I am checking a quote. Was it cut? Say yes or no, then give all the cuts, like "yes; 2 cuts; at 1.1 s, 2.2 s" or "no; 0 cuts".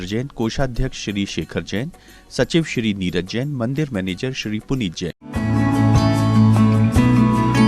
yes; 1 cut; at 5.1 s